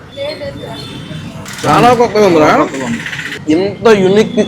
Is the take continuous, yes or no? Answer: no